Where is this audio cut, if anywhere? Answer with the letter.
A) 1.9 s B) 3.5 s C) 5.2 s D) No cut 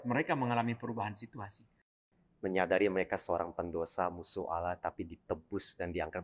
A